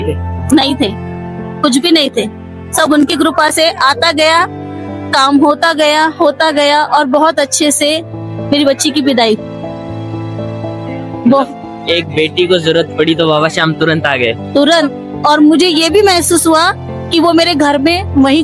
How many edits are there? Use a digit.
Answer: 0